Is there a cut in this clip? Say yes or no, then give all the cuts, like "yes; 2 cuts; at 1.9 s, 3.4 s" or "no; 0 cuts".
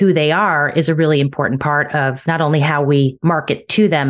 yes; 2 cuts; at 2.2 s, 3.2 s